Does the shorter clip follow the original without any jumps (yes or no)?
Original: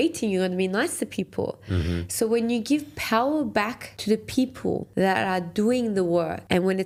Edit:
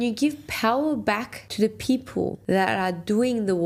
yes